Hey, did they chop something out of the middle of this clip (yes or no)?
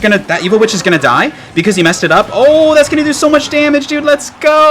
no